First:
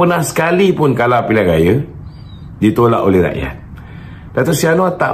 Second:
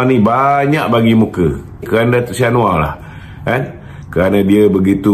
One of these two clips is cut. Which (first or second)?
second